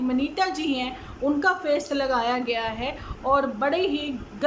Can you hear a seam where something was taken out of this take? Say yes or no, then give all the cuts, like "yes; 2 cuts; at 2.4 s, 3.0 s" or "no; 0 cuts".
no; 0 cuts